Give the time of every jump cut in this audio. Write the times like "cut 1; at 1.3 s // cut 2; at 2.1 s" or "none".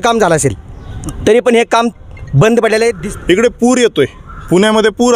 cut 1; at 3.0 s